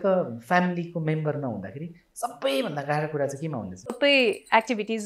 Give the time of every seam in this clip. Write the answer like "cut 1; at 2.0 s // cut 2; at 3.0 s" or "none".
cut 1; at 3.9 s